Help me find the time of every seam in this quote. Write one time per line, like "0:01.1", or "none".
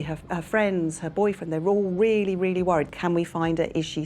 0:02.9